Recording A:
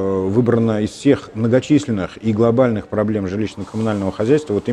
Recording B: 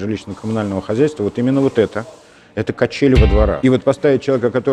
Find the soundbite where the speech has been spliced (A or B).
B